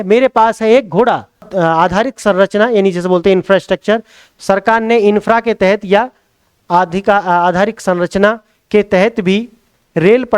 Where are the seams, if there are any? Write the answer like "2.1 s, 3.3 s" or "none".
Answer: 1.5 s